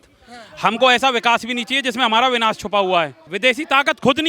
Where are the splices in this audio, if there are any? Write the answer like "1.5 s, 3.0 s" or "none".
3.3 s